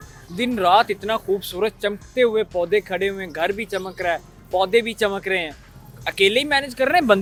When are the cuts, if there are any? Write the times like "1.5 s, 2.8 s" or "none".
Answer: none